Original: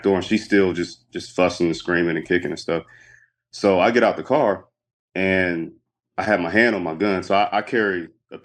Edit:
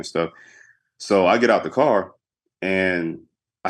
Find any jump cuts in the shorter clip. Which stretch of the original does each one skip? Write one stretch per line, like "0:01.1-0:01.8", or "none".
none

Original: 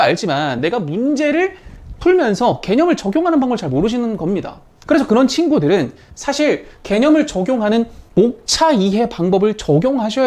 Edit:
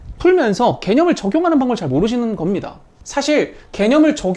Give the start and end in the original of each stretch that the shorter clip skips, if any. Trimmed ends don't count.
0:04.7-0:06.0

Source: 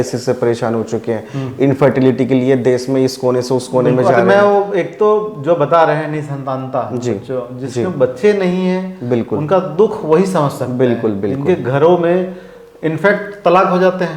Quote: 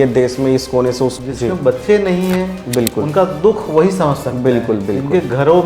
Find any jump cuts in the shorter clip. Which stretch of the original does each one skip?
0:03.7-0:07.5

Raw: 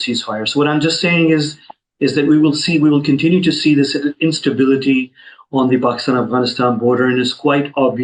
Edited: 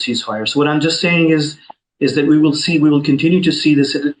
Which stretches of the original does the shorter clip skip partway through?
none

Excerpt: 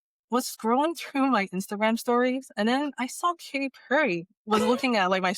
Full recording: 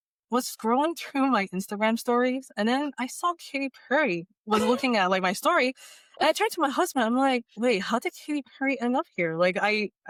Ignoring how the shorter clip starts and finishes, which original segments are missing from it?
none

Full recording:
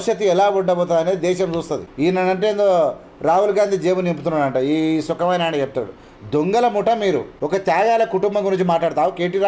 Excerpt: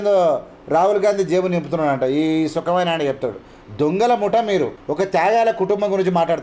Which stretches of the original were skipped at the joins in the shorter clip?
none

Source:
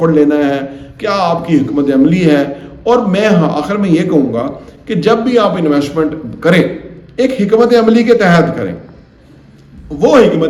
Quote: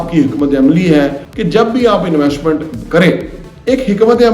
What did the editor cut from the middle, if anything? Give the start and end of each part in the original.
0:02.6-0:04.8

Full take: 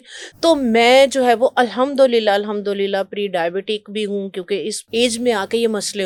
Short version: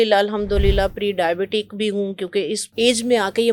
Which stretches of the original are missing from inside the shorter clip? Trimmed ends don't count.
none

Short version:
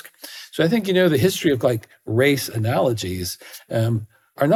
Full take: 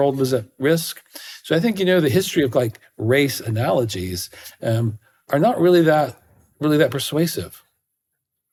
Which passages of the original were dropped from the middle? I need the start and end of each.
none

